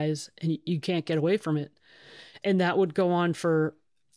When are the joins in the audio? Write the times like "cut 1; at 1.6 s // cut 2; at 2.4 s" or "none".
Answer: cut 1; at 2.3 s